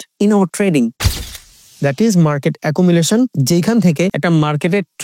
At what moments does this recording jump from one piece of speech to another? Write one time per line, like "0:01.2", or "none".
0:01.4
0:03.4
0:04.2